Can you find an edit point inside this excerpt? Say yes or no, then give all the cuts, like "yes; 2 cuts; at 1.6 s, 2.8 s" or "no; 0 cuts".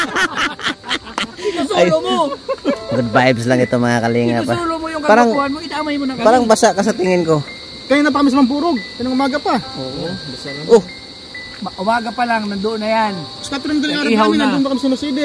no; 0 cuts